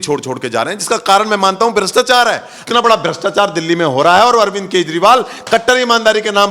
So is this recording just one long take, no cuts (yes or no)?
no